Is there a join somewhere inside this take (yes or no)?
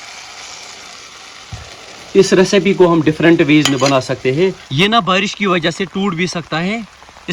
yes